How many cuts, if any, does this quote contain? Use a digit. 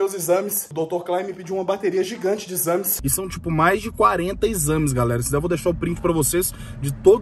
1